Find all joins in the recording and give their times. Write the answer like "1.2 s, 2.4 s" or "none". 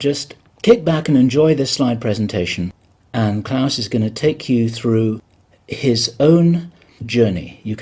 3.3 s